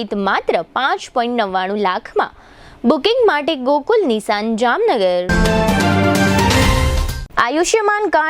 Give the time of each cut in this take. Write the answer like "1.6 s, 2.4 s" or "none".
none